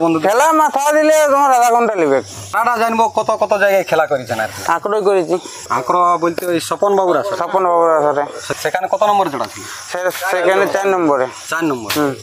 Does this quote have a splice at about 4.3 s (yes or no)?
no